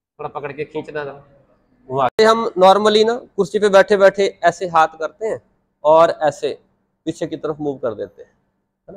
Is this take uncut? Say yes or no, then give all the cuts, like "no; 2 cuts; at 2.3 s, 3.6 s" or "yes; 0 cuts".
no; 1 cut; at 2.1 s